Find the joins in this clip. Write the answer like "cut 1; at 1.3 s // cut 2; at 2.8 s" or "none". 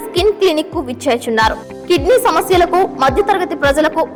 none